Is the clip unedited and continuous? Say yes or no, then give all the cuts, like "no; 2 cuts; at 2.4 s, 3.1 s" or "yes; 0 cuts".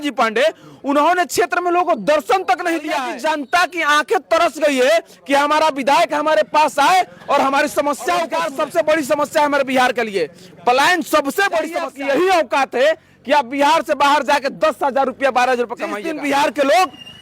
no; 4 cuts; at 3.0 s, 8.4 s, 11.8 s, 16.1 s